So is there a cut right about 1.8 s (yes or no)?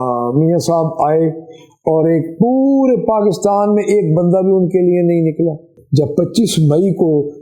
no